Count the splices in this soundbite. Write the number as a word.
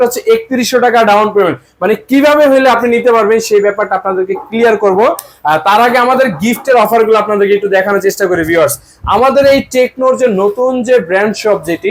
zero